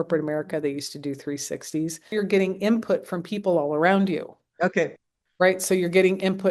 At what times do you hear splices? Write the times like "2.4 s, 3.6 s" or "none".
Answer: 2.1 s